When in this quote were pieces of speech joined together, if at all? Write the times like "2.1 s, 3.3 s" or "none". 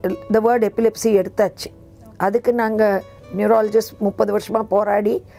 none